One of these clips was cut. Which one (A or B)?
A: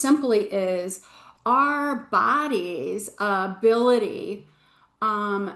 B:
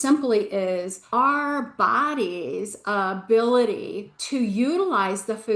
B